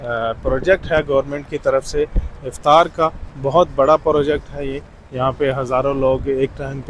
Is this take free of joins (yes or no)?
yes